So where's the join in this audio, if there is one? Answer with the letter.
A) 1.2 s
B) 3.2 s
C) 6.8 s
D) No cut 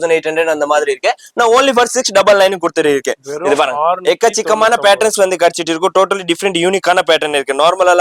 D